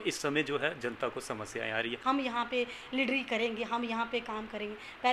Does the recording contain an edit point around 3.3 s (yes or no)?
no